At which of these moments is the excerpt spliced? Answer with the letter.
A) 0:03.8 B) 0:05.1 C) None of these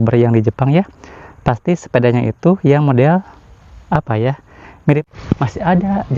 B